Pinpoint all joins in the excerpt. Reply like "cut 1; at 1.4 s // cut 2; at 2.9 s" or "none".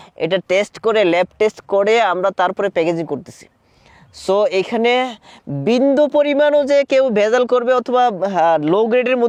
none